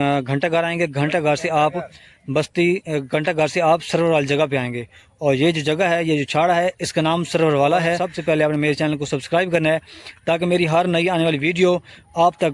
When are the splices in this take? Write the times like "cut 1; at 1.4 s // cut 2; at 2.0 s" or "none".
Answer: cut 1; at 8.1 s